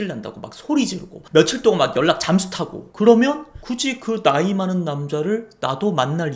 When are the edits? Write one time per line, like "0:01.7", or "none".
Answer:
none